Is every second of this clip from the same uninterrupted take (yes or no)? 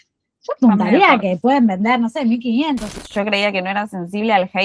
no